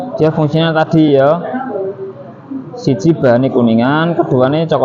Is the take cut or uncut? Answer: uncut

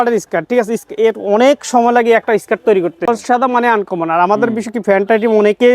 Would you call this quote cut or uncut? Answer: cut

